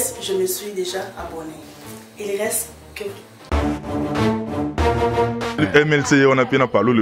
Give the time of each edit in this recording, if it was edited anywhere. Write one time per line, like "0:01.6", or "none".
0:05.6